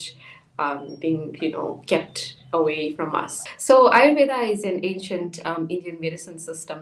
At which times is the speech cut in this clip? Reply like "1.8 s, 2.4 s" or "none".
3.4 s